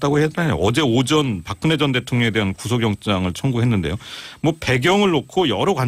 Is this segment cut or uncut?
uncut